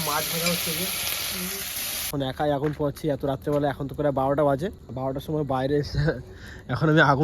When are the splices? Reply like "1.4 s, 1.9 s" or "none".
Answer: 2.1 s, 4.8 s